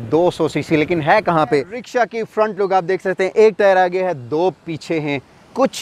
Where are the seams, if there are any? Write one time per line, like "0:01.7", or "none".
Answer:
0:01.8